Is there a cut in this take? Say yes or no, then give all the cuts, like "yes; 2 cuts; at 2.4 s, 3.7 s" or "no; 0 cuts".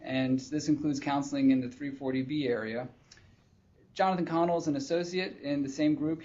yes; 1 cut; at 2.7 s